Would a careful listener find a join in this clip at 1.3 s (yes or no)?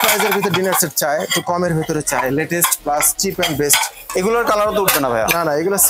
no